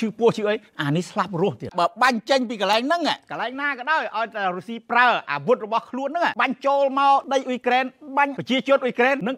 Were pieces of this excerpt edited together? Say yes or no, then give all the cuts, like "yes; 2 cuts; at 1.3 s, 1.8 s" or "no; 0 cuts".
yes; 1 cut; at 1.7 s